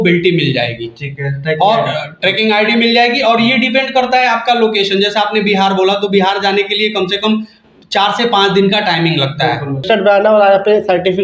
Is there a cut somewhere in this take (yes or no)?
yes